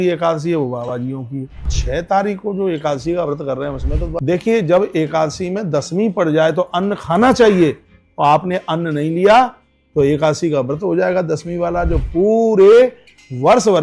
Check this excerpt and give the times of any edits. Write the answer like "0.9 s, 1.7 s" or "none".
1.7 s, 4.1 s